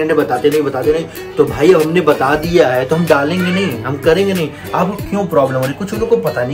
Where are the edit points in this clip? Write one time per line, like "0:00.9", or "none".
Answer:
none